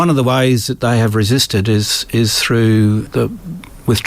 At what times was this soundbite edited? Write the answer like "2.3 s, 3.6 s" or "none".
3.1 s

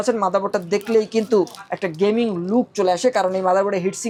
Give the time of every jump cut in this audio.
none

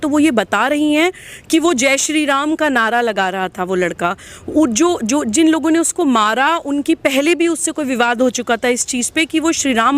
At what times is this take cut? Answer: none

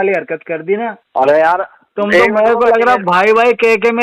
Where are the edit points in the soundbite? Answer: 1.0 s

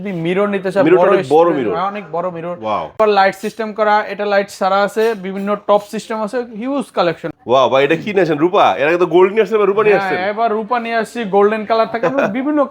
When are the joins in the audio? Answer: 3.0 s, 7.3 s

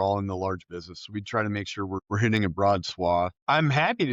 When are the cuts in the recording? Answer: none

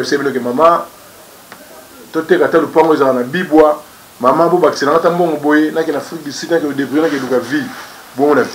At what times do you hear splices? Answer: none

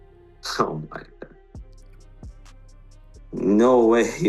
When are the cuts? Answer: 1.5 s, 2.9 s

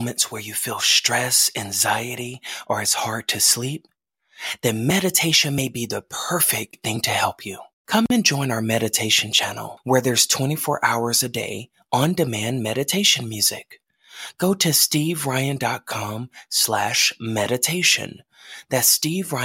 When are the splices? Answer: none

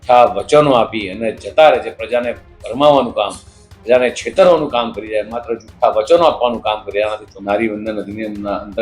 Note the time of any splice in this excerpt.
7.3 s

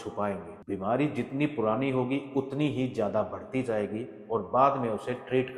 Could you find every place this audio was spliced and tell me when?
none

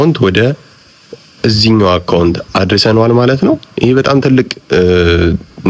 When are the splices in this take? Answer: none

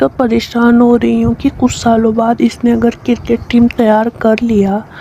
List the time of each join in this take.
none

